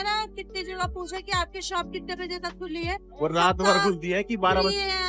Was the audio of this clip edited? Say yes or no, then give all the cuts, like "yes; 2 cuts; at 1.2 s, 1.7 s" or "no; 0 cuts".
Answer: no; 0 cuts